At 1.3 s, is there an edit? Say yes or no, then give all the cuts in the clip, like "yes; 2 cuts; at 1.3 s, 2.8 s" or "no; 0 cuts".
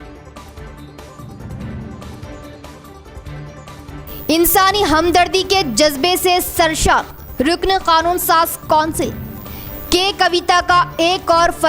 yes; 2 cuts; at 1.3 s, 3.7 s